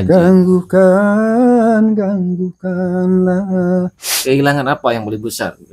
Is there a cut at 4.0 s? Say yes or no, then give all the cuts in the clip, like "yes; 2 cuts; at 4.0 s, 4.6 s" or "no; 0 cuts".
yes; 1 cut; at 4.0 s